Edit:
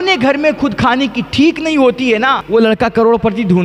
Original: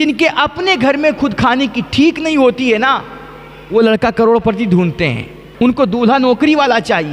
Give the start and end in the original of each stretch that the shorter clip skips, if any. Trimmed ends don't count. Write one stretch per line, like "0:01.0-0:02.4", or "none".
0:03.0-0:03.6